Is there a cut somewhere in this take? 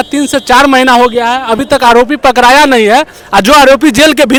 no; 0 cuts

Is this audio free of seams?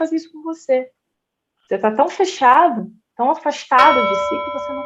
yes; 0 cuts

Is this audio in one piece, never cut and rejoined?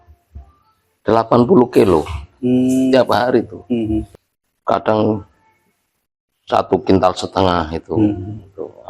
no; 1 cut; at 4.1 s

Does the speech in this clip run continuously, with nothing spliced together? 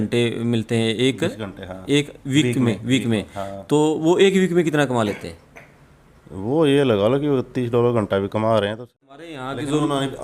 no; 1 cut; at 9.2 s

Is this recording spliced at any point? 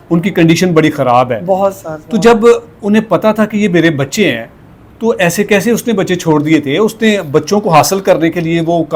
no; 0 cuts

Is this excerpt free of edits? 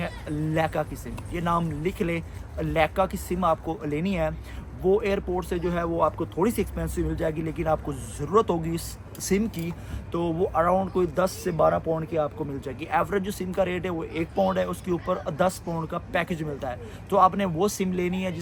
yes; 0 cuts

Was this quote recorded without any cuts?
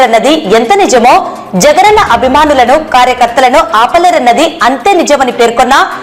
yes; 0 cuts

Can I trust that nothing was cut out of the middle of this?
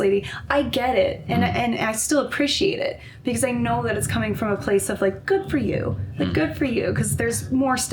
yes; 0 cuts

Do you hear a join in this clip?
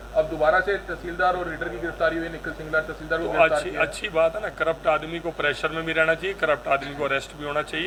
no; 0 cuts

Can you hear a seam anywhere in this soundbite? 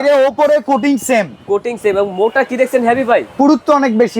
yes; 1 cut; at 3.3 s

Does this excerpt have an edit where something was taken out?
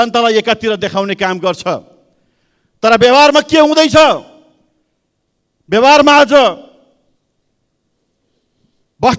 no; 0 cuts

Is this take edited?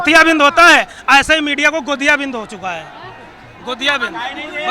no; 0 cuts

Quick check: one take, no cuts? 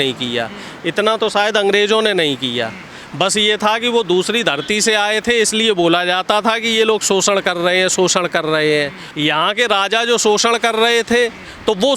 yes; 0 cuts

